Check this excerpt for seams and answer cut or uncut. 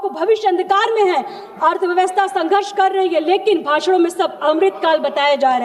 uncut